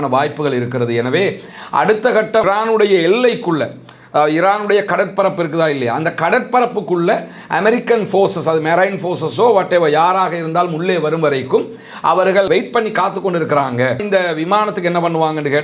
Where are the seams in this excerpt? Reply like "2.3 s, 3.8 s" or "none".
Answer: 14.0 s